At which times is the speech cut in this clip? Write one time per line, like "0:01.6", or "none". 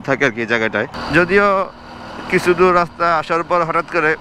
0:01.0